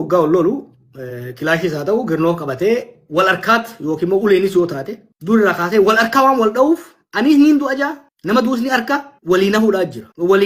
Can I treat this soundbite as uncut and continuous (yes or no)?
yes